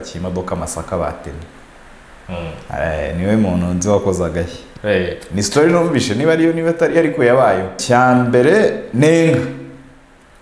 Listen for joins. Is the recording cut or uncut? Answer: cut